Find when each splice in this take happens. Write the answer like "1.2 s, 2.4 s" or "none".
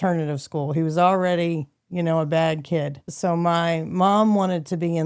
3.1 s